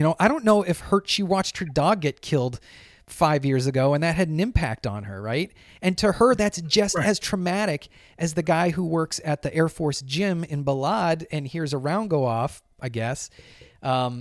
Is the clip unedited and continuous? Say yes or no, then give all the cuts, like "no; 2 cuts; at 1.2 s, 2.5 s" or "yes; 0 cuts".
yes; 0 cuts